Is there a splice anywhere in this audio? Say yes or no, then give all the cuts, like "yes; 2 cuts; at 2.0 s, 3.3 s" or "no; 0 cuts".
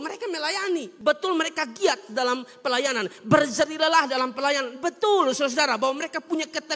yes; 1 cut; at 0.9 s